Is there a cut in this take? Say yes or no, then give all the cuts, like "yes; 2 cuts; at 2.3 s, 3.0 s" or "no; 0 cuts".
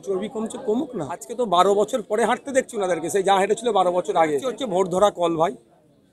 yes; 2 cuts; at 1.3 s, 4.5 s